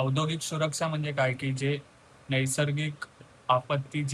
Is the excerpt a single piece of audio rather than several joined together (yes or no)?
yes